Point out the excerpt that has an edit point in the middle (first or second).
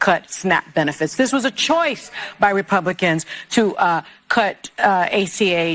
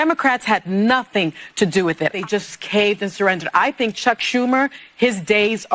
second